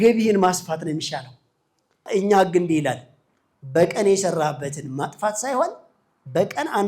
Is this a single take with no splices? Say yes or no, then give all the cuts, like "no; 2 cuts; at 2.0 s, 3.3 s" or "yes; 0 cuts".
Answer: no; 1 cut; at 2.0 s